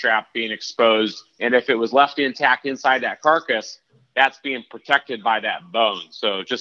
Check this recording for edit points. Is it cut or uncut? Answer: uncut